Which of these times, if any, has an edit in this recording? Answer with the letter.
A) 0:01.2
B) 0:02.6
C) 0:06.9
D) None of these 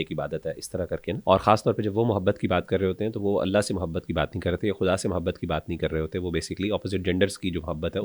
A